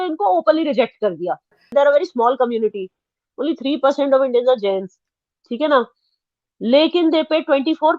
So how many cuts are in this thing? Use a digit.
1